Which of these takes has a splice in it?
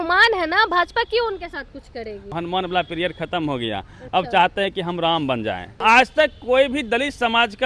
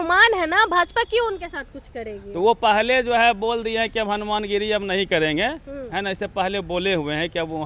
first; 2 cuts; at 2.3 s, 5.8 s

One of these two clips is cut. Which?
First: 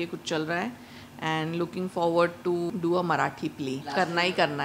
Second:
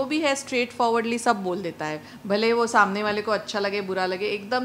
first; 2 cuts; at 2.7 s, 3.8 s

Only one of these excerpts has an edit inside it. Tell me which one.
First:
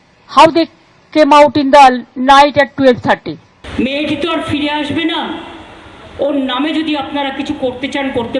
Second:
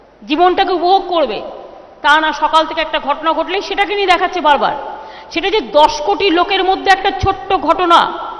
first; 1 cut; at 3.5 s

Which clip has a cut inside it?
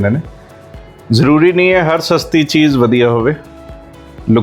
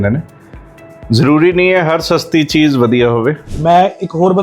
second; 1 cut; at 3.5 s

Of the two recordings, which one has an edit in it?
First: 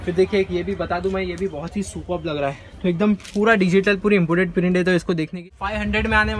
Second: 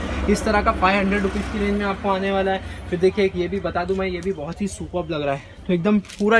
first; 1 cut; at 5.4 s

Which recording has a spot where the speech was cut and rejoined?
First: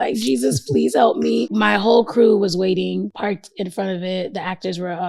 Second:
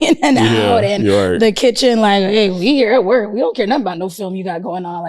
first; 2 cuts; at 1.5 s, 3.1 s

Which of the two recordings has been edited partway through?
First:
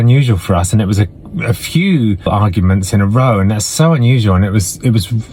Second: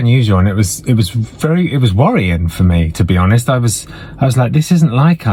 first; 1 cut; at 2.3 s

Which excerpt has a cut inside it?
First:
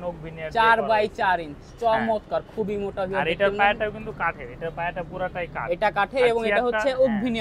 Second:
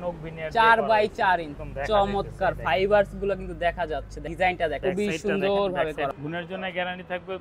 second; 4 cuts; at 1.6 s, 4.2 s, 4.8 s, 6.1 s

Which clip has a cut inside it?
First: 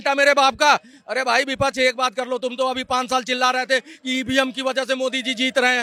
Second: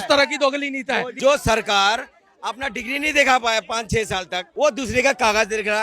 second; 2 cuts; at 1.1 s, 4.4 s

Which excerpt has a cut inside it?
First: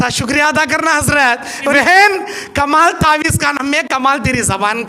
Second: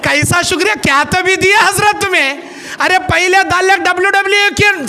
first; 1 cut; at 1.7 s

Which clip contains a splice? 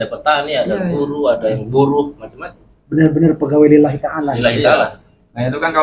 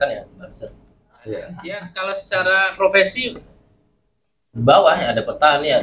second; 1 cut; at 1.9 s

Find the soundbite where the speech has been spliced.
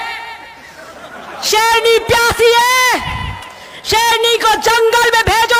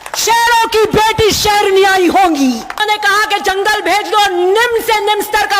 second; 1 cut; at 2.8 s

